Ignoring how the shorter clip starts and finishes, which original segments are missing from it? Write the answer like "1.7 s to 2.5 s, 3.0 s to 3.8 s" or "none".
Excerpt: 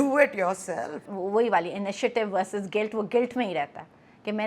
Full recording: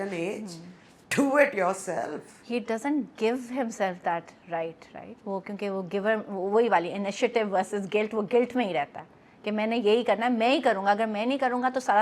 2.3 s to 6.3 s